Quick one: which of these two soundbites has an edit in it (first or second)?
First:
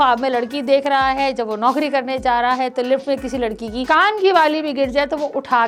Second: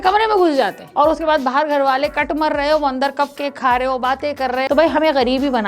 second